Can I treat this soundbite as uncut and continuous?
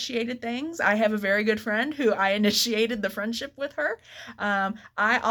yes; 0 cuts

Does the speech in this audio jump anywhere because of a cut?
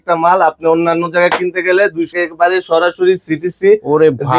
yes; 1 cut; at 2.2 s

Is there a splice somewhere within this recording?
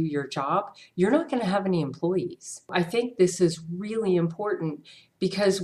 yes; 1 cut; at 2.7 s

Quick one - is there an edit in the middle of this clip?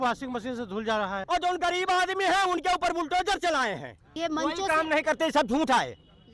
yes; 2 cuts; at 1.2 s, 4.1 s

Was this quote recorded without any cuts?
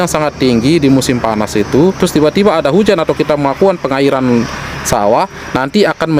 yes; 0 cuts

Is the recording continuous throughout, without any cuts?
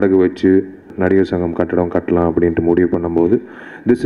no; 1 cut; at 0.9 s

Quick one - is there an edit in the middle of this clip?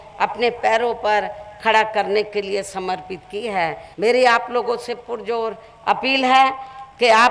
yes; 1 cut; at 3.8 s

